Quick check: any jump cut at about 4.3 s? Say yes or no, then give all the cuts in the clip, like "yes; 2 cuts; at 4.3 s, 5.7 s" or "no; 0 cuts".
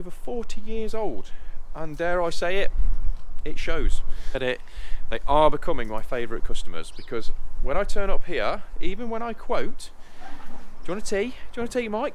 yes; 1 cut; at 4.3 s